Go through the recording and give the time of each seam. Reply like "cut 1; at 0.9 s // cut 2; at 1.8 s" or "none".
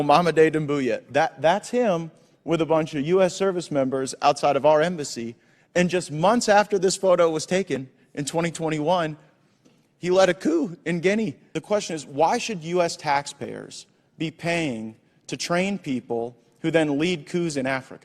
cut 1; at 11.5 s